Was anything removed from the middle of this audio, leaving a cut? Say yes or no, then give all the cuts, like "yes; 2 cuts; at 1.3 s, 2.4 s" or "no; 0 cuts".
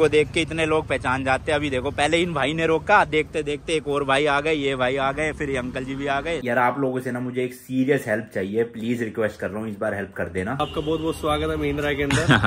yes; 2 cuts; at 6.4 s, 10.6 s